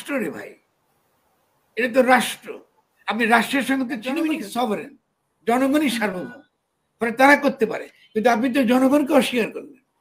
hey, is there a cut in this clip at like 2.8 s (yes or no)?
no